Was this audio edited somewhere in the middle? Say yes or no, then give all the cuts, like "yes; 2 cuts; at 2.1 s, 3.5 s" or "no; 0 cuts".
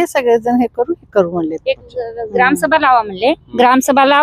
no; 0 cuts